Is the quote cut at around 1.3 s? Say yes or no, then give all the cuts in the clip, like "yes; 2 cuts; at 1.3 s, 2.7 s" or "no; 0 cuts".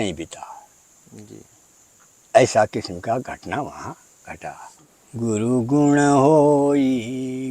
no; 1 cut; at 4.8 s